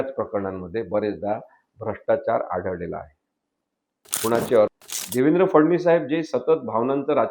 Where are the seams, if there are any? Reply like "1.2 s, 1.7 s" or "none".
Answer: 4.7 s